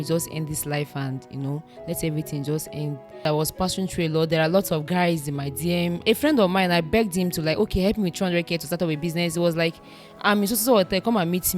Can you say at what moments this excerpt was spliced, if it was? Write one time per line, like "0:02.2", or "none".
0:03.2
0:06.0

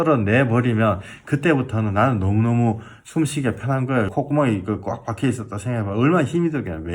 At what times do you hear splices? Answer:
0:03.0
0:04.1

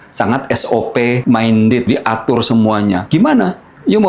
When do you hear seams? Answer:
0:01.2
0:01.9
0:03.0

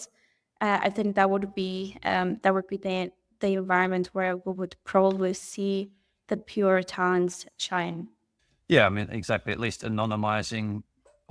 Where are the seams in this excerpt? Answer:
none

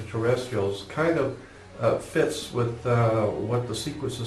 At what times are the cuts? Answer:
0:02.5

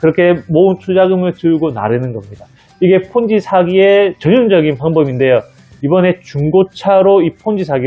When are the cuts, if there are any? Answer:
none

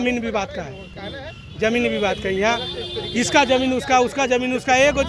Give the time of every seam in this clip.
none

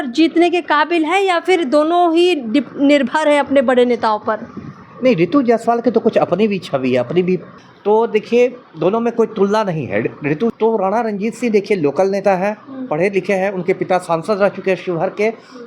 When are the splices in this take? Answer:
0:07.6
0:10.5

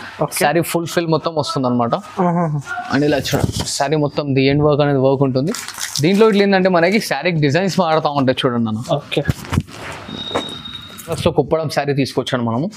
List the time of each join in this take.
0:11.2

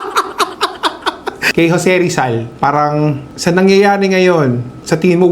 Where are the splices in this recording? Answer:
0:01.4

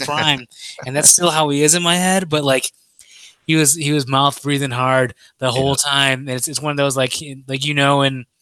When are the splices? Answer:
none

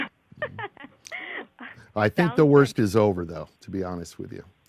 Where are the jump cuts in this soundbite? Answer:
0:02.3

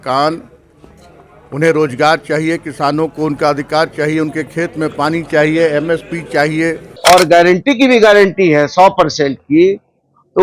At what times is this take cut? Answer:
0:06.8

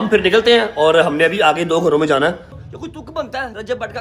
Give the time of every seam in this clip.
0:02.5

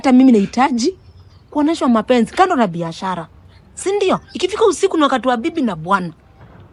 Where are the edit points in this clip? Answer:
none

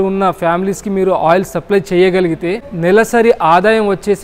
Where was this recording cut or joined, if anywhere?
0:02.7

